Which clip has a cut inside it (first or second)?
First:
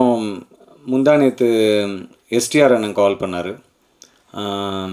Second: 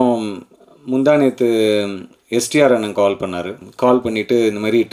second